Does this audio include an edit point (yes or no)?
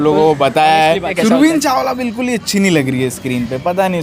yes